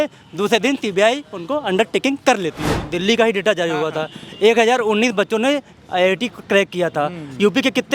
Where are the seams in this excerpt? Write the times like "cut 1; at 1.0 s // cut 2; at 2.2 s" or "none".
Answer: cut 1; at 2.7 s